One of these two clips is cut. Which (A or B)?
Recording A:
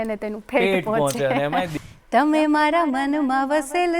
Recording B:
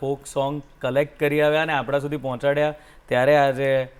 A